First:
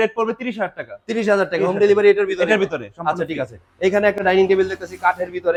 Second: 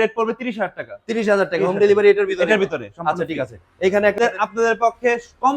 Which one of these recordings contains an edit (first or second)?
second